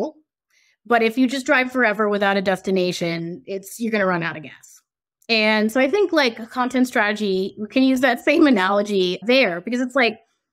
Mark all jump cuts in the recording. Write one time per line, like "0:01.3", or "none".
none